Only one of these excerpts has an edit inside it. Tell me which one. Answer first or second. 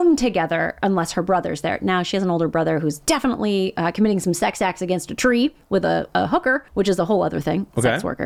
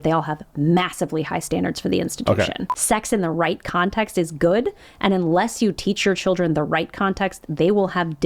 second